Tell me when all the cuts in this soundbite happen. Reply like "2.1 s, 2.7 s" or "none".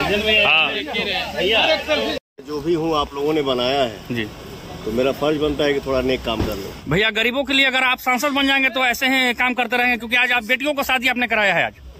2.2 s